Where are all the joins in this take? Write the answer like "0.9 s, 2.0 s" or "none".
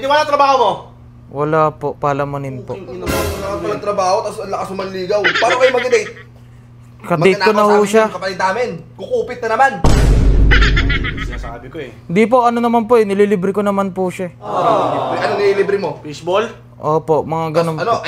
none